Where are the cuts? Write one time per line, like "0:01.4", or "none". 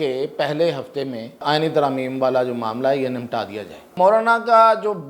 0:01.4
0:03.9

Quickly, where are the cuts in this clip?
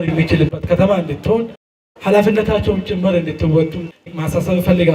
0:04.0

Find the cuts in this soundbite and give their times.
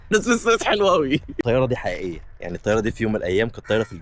0:01.4

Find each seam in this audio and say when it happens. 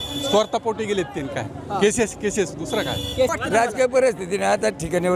0:03.3

